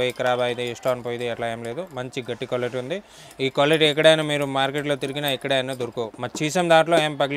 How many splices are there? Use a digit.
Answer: 0